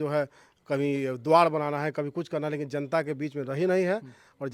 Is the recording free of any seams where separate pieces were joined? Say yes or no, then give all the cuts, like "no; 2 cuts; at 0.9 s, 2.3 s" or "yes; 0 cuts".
yes; 0 cuts